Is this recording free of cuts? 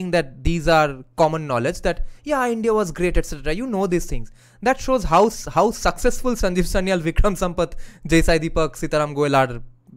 yes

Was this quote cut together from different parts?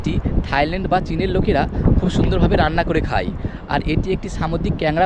no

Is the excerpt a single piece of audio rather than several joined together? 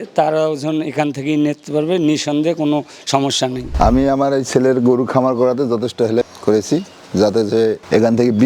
no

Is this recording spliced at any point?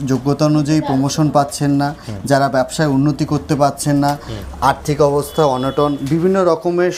no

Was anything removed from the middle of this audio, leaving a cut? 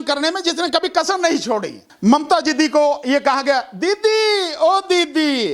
yes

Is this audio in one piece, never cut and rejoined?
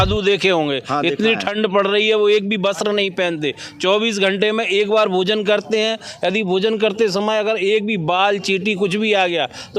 yes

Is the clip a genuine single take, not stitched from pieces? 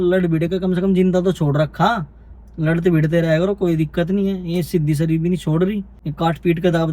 no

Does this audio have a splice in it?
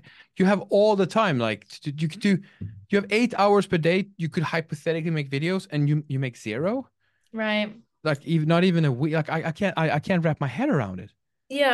no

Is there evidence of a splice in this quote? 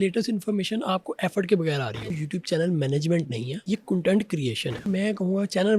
yes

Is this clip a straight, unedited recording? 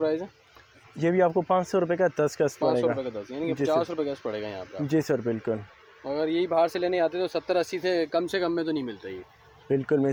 yes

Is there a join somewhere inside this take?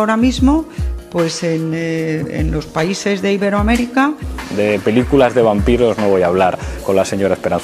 yes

